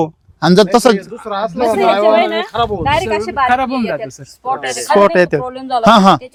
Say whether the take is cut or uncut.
uncut